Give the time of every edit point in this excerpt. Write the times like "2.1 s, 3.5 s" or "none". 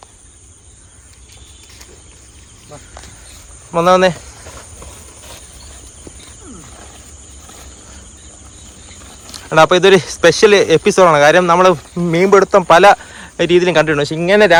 none